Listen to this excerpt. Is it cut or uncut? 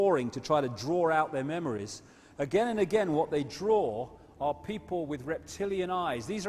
cut